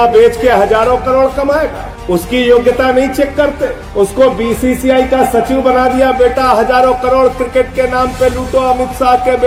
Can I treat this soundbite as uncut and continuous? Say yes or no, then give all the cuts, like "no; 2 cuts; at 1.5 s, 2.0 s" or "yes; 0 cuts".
yes; 0 cuts